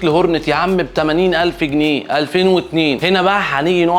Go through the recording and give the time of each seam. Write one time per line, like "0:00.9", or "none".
none